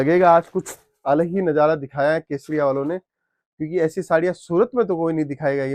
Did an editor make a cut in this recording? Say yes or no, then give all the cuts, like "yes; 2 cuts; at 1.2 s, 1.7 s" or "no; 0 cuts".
no; 0 cuts